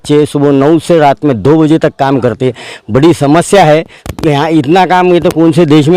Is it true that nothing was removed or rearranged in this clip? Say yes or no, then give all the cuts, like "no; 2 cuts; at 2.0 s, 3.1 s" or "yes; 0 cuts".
yes; 0 cuts